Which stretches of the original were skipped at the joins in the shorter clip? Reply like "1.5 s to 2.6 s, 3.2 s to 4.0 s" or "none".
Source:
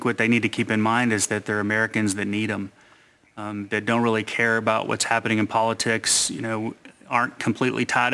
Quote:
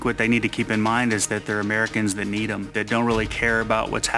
2.7 s to 3.7 s